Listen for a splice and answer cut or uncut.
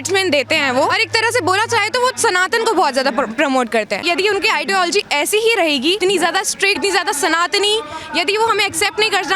cut